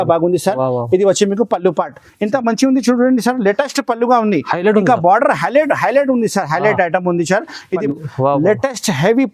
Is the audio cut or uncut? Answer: cut